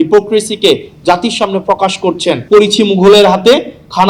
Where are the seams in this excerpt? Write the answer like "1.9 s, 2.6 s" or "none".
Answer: 2.4 s